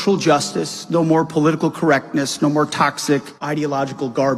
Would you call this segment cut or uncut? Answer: cut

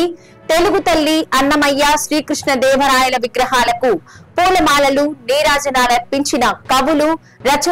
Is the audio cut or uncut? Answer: uncut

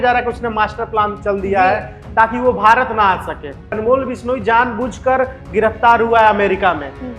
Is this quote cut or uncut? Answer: cut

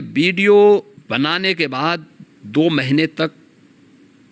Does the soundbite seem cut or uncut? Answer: cut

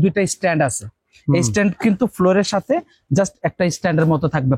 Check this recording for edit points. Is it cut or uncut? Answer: uncut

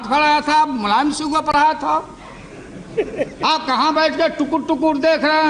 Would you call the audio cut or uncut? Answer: uncut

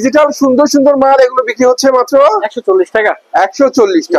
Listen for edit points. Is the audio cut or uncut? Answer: uncut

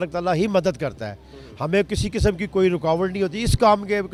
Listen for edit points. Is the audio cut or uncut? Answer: uncut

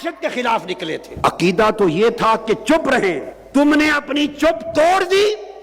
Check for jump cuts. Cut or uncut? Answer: cut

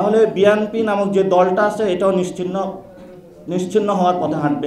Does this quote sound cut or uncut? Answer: uncut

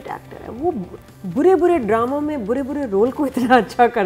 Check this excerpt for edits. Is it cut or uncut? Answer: uncut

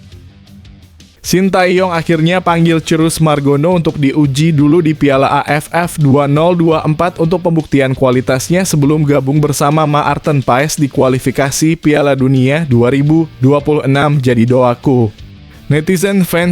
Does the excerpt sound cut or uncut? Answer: cut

